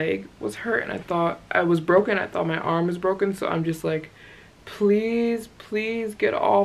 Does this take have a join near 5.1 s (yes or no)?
no